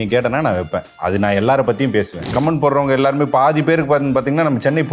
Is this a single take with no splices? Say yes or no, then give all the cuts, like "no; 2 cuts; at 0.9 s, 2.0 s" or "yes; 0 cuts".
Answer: no; 2 cuts; at 0.9 s, 2.3 s